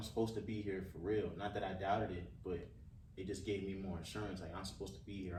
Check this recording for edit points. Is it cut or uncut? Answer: uncut